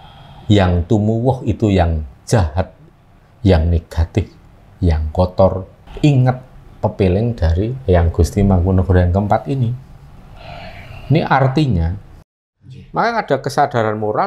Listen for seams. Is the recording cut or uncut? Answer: cut